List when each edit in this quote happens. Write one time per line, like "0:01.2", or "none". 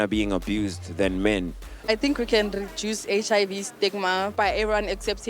0:01.9

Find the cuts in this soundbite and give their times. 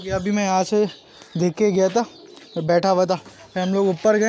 none

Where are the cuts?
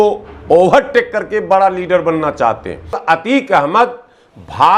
0:03.0

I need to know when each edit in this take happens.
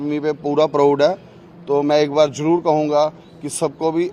none

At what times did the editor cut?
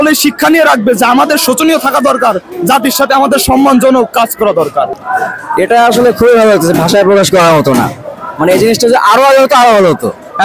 none

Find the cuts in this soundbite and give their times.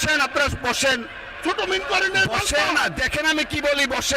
0:01.4

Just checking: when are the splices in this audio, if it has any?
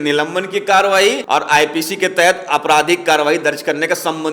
0:01.2

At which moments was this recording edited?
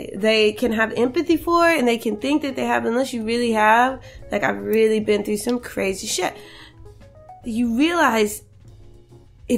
none

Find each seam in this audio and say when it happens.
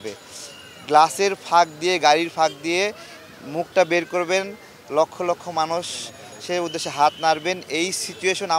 none

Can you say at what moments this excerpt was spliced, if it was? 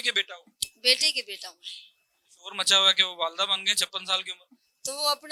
none

